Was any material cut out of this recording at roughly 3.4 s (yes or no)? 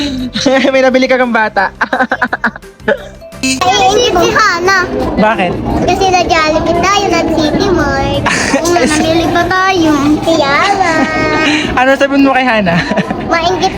yes